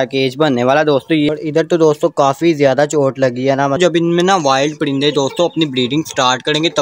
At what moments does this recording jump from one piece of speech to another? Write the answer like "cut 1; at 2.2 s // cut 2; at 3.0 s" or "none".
cut 1; at 1.3 s // cut 2; at 3.8 s